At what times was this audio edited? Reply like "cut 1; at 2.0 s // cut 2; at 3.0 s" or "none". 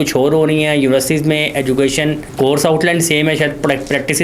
cut 1; at 2.2 s